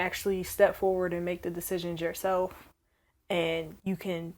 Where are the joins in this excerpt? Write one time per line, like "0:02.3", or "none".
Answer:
none